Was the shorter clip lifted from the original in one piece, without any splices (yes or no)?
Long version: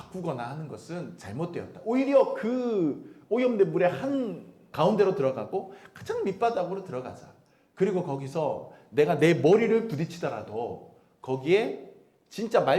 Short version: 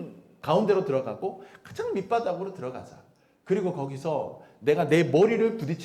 yes